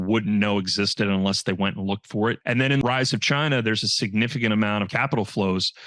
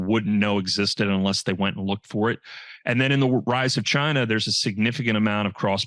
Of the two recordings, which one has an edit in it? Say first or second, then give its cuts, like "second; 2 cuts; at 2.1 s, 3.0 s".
first; 2 cuts; at 2.8 s, 4.9 s